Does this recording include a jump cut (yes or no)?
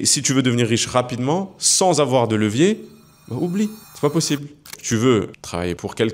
yes